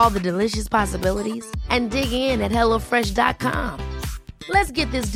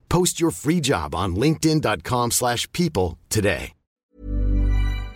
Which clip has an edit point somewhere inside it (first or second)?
second